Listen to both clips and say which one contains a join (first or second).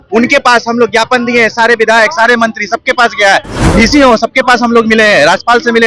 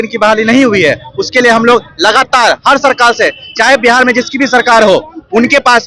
first